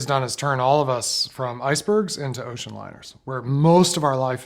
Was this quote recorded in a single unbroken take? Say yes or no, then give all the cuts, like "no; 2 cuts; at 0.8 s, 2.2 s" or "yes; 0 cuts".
yes; 0 cuts